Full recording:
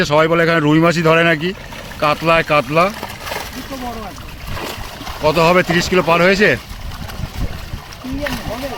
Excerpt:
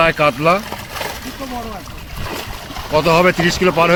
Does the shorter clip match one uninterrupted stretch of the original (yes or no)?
yes